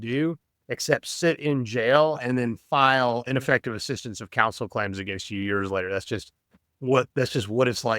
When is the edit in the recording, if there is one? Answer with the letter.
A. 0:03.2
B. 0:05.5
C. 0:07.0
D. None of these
A